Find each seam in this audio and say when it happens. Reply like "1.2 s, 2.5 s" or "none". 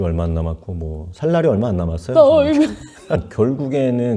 3.3 s

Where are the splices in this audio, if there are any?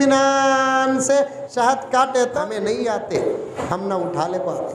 2.4 s, 3.5 s

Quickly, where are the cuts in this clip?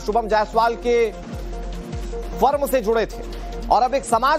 none

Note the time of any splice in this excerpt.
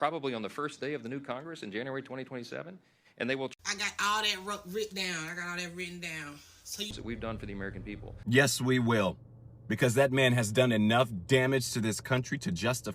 6.9 s

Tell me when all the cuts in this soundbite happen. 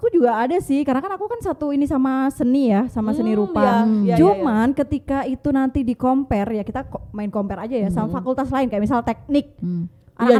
none

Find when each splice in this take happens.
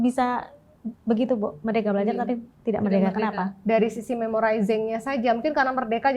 3.6 s

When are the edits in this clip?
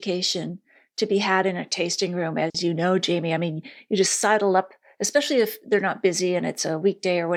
none

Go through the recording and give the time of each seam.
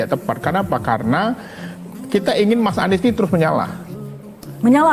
none

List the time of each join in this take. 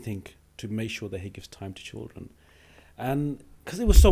none

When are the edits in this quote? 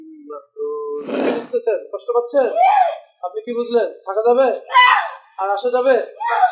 1.2 s

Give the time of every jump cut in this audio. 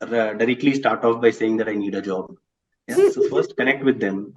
none

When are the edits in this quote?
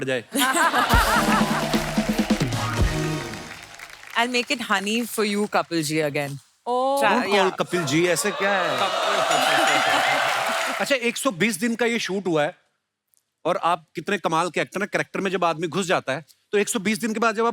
10.7 s

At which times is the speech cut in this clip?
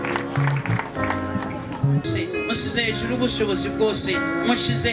2.1 s

